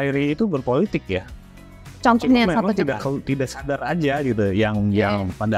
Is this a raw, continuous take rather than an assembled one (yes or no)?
yes